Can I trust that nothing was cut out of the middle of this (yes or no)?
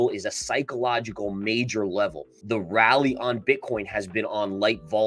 no